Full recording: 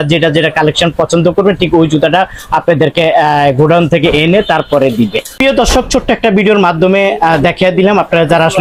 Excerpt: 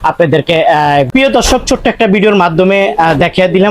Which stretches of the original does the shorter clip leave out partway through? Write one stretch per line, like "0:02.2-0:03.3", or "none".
0:03.5-0:05.3